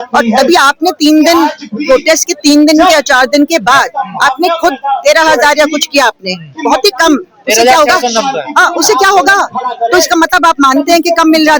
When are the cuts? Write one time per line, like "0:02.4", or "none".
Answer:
none